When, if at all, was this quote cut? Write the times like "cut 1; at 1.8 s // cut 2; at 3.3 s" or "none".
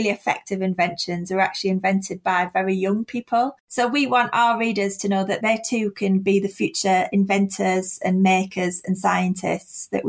cut 1; at 3.6 s // cut 2; at 5.4 s